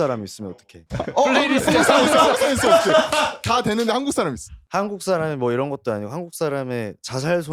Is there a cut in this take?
no; 0 cuts

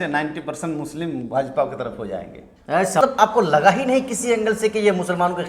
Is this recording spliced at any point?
yes; 1 cut; at 3.0 s

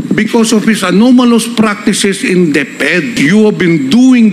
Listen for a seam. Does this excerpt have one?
yes; 1 cut; at 3.1 s

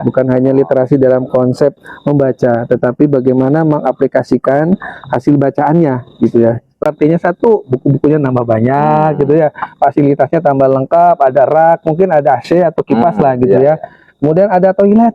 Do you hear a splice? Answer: yes; 1 cut; at 6.9 s

